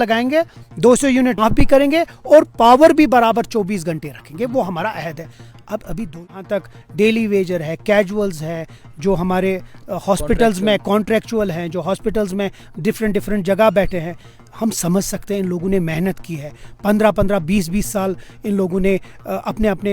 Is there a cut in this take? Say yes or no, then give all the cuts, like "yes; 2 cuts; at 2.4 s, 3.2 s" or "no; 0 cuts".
yes; 2 cuts; at 1.4 s, 6.1 s